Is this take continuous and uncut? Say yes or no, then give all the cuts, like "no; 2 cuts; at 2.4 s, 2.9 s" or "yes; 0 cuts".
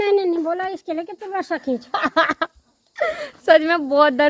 yes; 0 cuts